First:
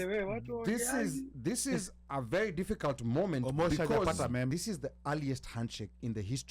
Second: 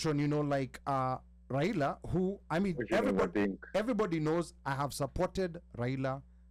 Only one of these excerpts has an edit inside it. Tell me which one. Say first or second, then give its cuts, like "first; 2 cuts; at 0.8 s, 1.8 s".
first; 1 cut; at 4.5 s